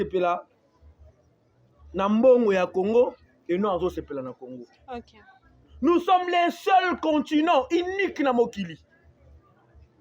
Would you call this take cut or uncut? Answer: uncut